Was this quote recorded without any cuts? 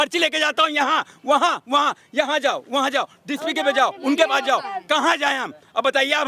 yes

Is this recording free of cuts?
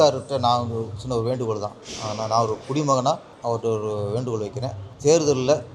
no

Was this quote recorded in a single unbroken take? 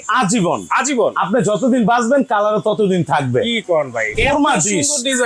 no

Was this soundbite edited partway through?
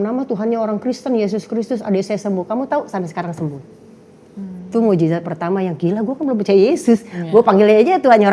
no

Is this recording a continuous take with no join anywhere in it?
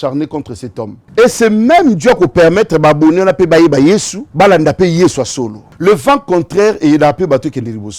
no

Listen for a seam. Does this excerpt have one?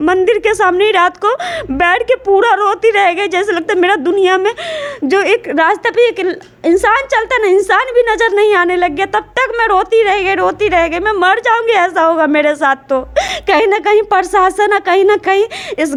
no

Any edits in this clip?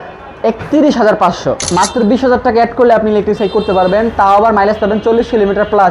yes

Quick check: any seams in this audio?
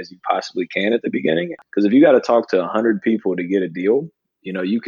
yes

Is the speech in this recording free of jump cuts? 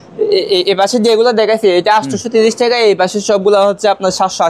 yes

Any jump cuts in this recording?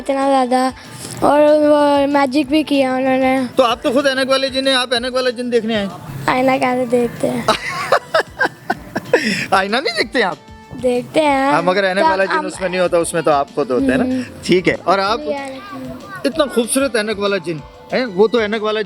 no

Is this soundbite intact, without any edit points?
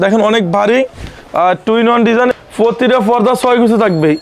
no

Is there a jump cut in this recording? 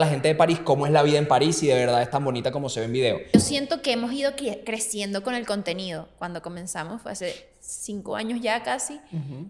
yes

